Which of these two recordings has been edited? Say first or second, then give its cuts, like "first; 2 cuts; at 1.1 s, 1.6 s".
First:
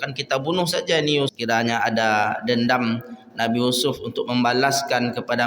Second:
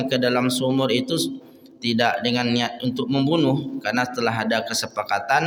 first; 1 cut; at 1.3 s